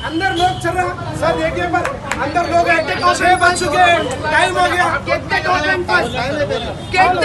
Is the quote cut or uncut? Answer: uncut